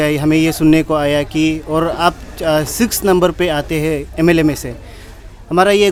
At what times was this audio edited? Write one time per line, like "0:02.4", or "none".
none